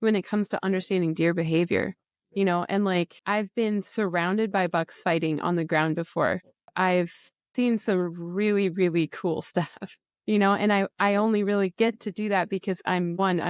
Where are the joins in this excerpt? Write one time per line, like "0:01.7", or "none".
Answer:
0:03.2
0:06.6
0:07.5